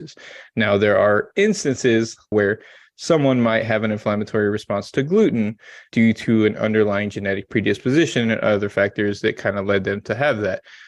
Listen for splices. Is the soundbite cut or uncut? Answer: cut